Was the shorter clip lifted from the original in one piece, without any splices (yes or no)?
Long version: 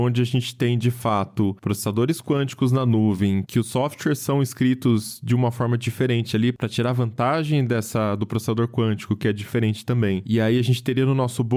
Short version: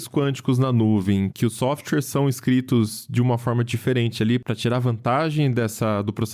yes